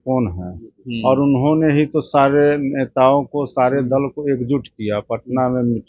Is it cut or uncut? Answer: uncut